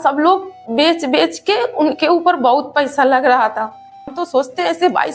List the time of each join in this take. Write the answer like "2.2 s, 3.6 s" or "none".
4.1 s